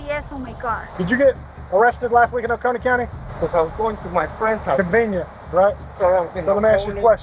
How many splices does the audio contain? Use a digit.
3